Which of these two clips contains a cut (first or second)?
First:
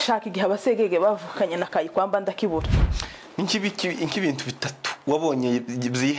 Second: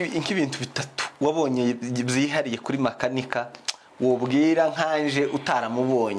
first